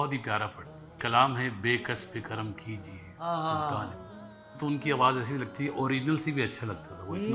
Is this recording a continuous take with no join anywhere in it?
no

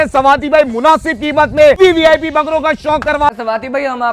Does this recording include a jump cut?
yes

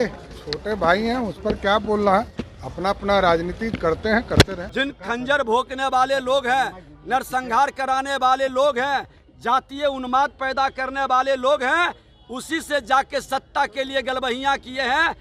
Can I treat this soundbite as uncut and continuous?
no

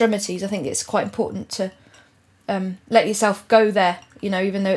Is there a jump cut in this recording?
no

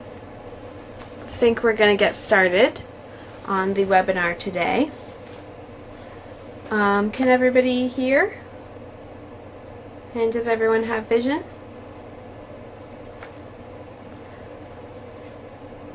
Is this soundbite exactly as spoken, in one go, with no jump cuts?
yes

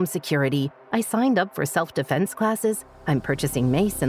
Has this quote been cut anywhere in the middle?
no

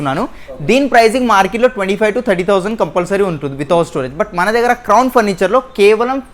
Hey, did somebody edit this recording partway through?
no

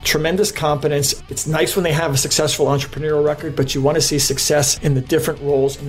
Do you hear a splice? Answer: no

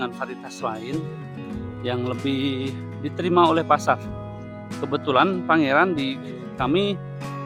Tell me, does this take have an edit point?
no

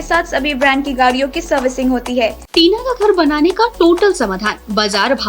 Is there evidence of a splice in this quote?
yes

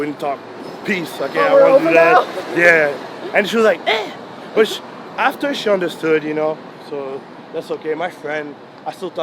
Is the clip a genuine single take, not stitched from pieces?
yes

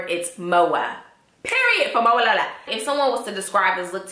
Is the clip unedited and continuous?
no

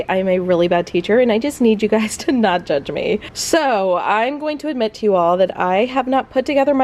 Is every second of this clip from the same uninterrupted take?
yes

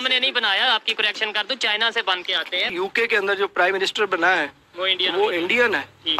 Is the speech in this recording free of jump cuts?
no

